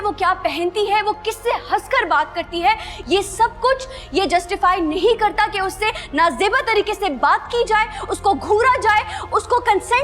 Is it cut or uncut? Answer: uncut